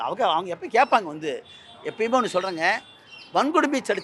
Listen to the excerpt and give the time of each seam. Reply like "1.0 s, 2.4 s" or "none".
none

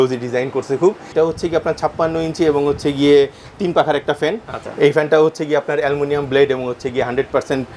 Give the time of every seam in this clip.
1.0 s, 4.5 s

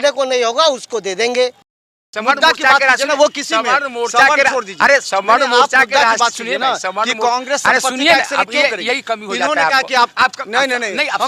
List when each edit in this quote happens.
1.9 s

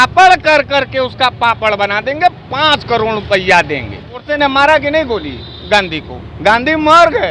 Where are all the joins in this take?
4.3 s

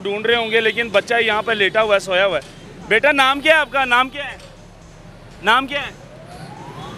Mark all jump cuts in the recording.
none

